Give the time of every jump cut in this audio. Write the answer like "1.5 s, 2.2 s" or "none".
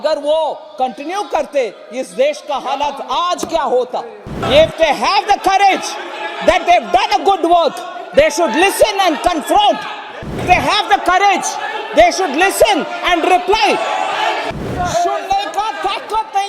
4.4 s, 10.4 s, 14.5 s